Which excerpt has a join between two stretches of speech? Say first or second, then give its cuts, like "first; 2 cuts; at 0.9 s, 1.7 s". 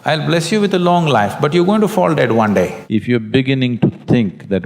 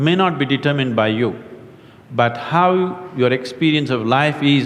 first; 1 cut; at 2.8 s